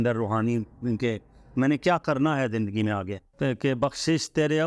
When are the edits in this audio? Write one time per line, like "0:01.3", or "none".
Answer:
0:03.3

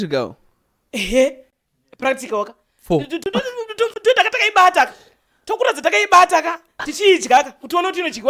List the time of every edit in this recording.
none

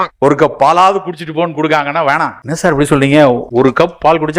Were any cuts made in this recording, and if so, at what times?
0:02.4
0:03.4

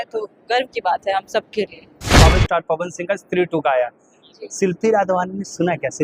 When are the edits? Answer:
0:02.1

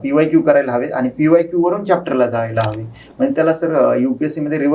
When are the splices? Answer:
none

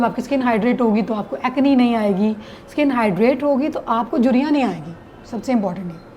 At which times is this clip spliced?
none

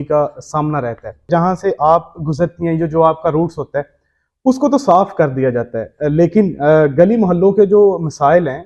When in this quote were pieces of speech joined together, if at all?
0:01.3

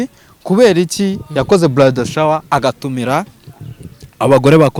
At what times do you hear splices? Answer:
none

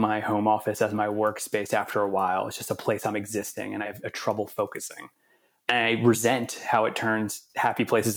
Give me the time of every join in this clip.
0:03.9
0:05.7

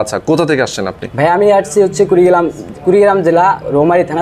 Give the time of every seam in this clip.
none

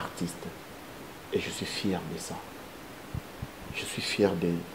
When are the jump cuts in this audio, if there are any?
none

